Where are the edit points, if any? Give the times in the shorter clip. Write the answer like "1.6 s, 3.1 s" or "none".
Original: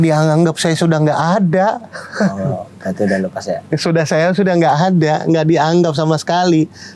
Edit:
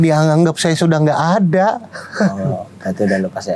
none